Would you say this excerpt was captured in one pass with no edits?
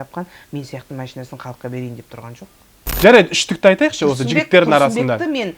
no; 1 cut; at 2.9 s

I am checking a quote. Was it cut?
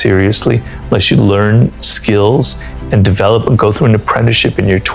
no; 0 cuts

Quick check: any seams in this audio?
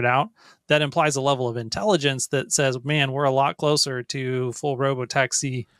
no; 0 cuts

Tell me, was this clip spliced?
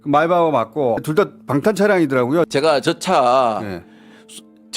yes; 2 cuts; at 1.0 s, 2.5 s

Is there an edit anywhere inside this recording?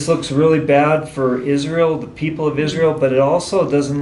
no; 0 cuts

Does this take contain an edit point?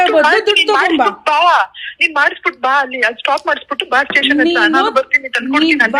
no; 0 cuts

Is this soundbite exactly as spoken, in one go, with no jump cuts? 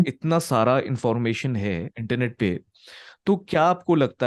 no; 1 cut; at 2.0 s

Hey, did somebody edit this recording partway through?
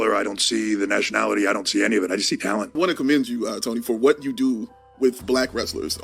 yes; 1 cut; at 2.7 s

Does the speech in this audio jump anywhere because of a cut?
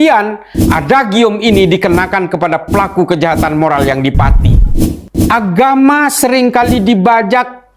yes; 1 cut; at 4.6 s

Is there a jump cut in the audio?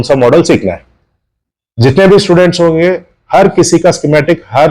no; 0 cuts

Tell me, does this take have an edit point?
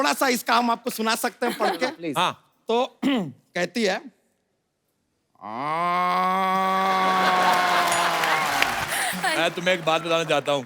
yes; 1 cut; at 8.8 s

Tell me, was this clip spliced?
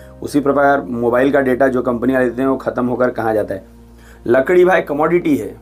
no; 0 cuts

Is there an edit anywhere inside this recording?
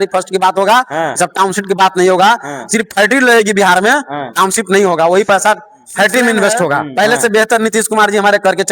yes; 1 cut; at 6.9 s

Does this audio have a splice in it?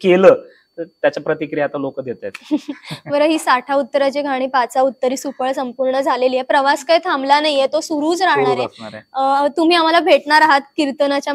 no; 0 cuts

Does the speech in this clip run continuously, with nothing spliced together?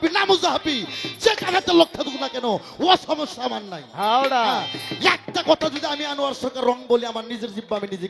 yes; 0 cuts

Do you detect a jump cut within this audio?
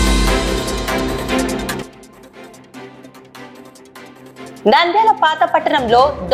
no; 0 cuts

